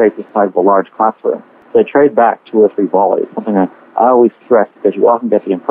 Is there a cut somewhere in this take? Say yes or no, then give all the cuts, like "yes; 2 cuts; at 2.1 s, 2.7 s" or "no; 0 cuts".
yes; 1 cut; at 1.5 s